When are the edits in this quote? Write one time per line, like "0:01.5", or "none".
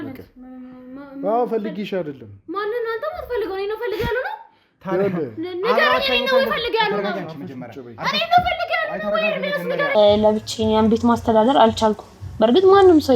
0:09.9